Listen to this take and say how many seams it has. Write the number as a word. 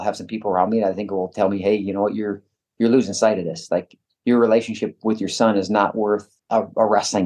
one